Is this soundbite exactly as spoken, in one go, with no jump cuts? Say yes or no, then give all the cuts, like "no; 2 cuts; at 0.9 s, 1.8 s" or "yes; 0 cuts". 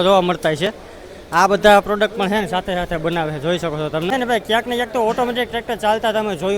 no; 1 cut; at 4.1 s